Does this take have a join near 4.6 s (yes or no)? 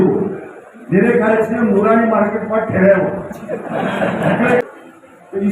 yes